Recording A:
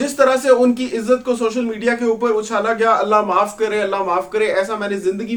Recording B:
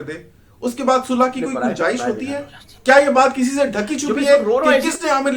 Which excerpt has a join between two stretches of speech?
B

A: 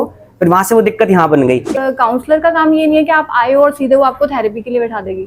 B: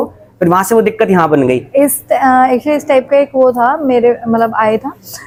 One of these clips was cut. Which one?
A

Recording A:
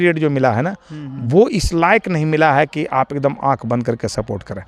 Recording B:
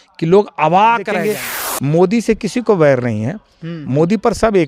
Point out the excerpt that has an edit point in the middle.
B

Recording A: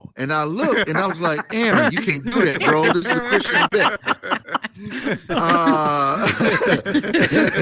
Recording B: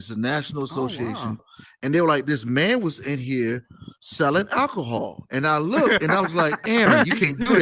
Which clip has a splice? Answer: B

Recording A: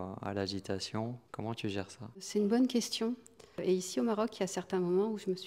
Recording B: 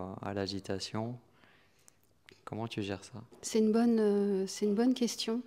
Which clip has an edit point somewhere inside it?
A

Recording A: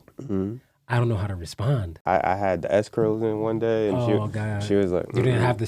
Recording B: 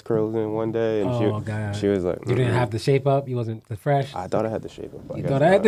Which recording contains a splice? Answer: A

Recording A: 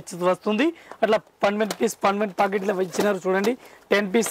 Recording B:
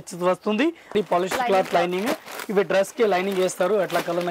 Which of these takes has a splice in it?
B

